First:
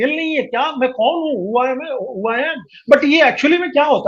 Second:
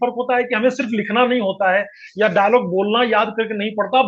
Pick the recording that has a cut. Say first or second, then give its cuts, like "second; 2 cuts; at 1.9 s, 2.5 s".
first; 1 cut; at 2.7 s